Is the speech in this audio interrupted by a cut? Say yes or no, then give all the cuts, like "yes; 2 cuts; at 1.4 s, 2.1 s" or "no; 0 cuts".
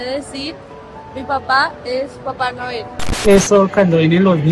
yes; 1 cut; at 3.2 s